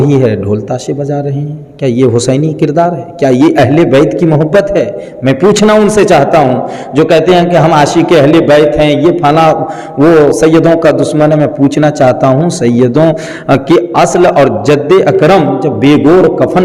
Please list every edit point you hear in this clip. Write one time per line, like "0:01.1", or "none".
none